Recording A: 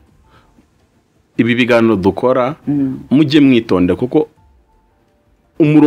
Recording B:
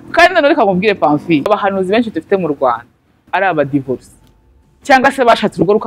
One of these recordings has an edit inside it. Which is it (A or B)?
B